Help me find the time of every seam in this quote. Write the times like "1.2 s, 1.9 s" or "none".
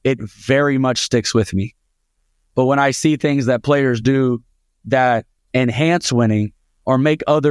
5.4 s